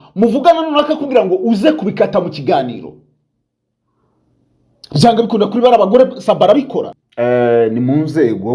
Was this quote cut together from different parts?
yes; 1 cut; at 7.0 s

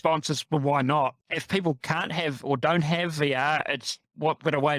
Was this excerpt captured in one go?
no; 1 cut; at 1.2 s

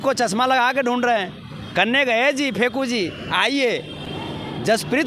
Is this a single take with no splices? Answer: yes; 0 cuts

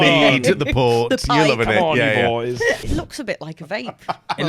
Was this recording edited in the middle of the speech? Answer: yes; 1 cut; at 2.9 s

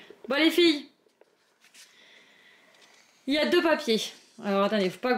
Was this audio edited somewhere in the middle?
no; 0 cuts

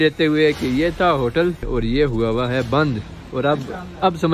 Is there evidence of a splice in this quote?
yes; 1 cut; at 1.6 s

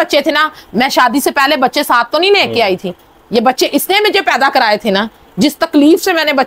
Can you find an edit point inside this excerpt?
no; 0 cuts

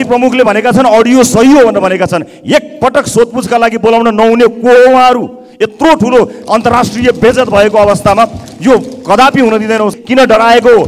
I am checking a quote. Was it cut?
yes; 1 cut; at 10.0 s

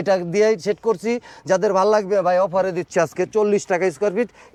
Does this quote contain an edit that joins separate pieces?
no; 0 cuts

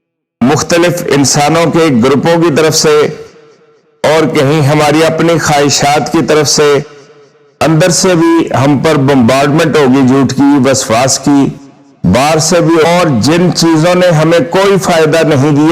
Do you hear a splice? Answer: yes; 1 cut; at 12.8 s

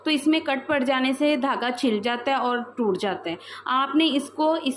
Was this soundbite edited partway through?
no; 0 cuts

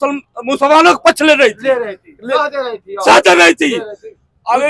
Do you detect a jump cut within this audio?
no; 0 cuts

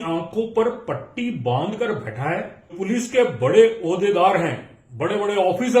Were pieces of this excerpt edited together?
yes; 1 cut; at 2.7 s

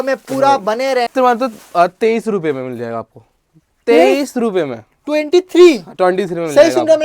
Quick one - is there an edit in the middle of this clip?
yes; 1 cut; at 1.1 s

